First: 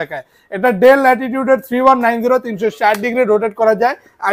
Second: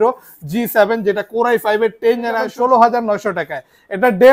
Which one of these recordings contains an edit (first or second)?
second